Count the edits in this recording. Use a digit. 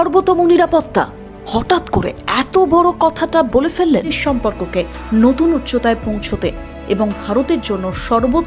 1